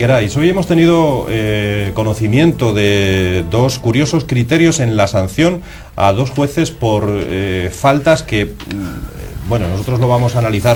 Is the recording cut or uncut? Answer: uncut